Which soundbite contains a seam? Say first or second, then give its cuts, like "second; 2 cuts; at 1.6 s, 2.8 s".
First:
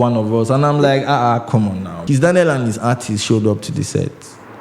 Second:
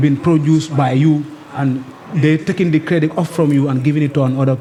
first; 1 cut; at 1.9 s